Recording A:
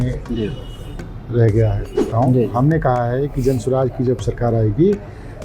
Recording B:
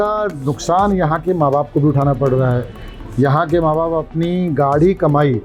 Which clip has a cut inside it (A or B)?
A